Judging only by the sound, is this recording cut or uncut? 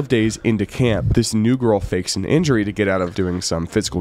cut